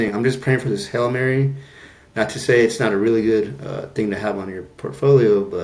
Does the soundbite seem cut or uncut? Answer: uncut